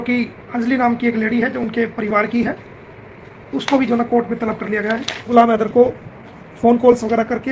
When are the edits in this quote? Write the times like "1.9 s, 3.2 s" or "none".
5.3 s